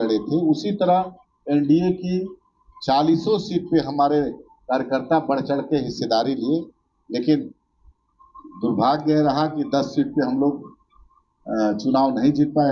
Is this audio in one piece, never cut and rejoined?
yes; 0 cuts

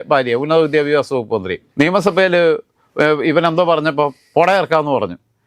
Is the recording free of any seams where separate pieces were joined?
no; 1 cut; at 1.6 s

